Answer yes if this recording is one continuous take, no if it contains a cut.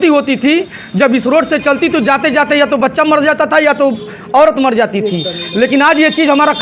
yes